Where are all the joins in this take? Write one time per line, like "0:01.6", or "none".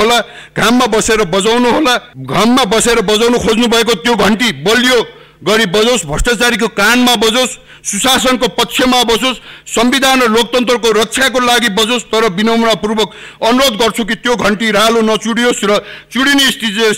0:02.1